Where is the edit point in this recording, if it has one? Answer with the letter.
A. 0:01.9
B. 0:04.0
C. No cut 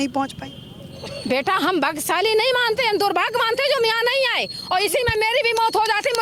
C